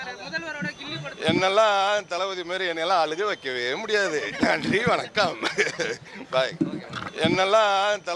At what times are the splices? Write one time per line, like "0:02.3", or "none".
0:07.0